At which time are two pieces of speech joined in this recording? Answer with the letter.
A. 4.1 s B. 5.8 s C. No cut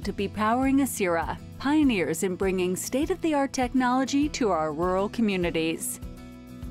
B